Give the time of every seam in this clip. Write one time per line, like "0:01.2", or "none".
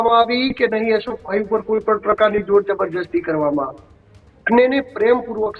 none